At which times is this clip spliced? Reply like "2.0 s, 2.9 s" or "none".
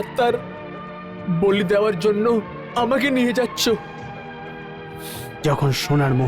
none